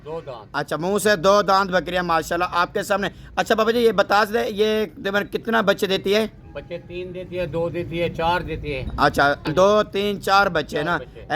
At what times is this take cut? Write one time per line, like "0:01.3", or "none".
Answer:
0:09.4